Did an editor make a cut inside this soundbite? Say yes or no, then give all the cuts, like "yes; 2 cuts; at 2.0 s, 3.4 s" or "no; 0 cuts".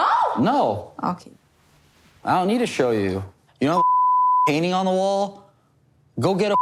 no; 0 cuts